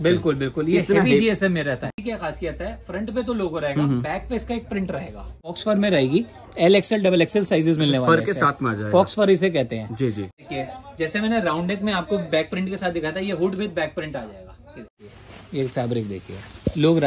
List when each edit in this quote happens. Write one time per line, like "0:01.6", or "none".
0:01.9
0:05.5
0:10.4
0:15.0